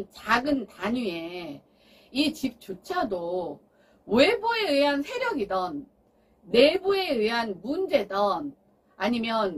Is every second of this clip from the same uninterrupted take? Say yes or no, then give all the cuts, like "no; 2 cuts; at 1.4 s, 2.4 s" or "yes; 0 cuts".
yes; 0 cuts